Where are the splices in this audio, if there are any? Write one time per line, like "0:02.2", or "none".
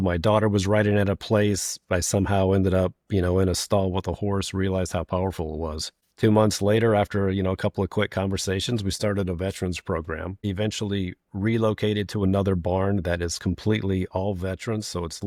none